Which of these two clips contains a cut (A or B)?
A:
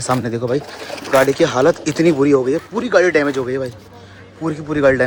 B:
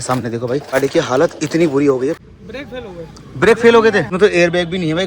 B